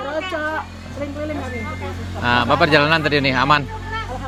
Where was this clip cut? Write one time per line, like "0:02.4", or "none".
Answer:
none